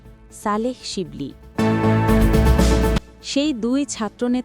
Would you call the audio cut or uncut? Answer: cut